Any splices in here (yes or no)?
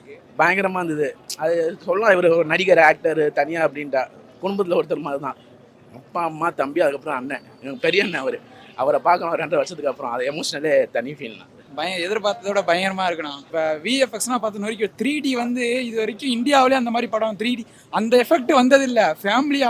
no